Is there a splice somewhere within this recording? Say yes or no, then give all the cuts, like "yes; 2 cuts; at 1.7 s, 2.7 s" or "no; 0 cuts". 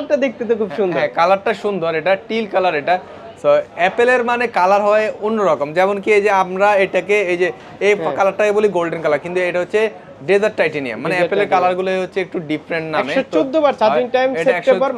no; 0 cuts